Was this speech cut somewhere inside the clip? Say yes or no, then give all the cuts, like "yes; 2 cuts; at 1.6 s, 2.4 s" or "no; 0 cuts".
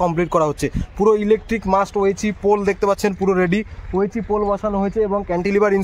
no; 0 cuts